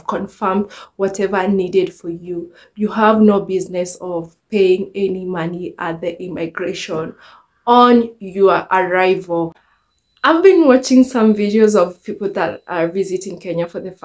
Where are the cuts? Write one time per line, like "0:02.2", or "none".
0:09.6